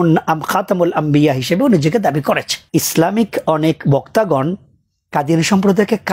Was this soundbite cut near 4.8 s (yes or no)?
no